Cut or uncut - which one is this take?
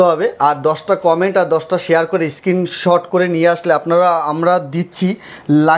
uncut